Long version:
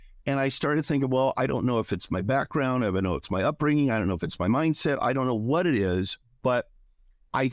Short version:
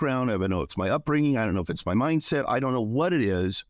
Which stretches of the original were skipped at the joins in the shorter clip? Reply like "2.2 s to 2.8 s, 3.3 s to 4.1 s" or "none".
none